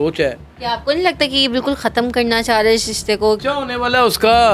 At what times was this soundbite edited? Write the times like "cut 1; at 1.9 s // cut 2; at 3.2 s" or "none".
cut 1; at 3.4 s